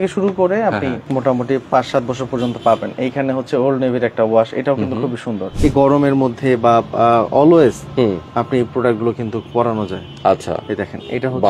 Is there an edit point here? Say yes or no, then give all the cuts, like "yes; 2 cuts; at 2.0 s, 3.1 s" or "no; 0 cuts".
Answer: yes; 2 cuts; at 1.0 s, 5.5 s